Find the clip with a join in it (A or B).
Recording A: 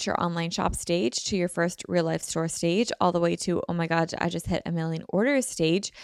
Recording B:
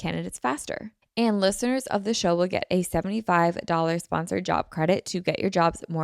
B